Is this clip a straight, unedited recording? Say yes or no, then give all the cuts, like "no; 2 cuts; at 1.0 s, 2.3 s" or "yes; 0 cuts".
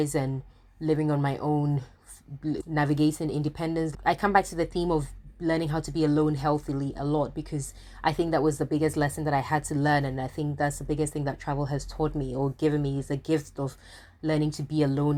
yes; 0 cuts